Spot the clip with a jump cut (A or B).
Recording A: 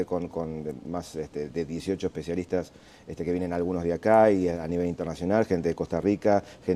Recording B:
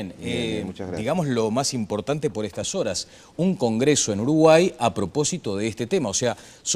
B